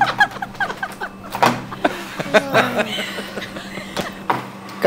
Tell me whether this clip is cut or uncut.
uncut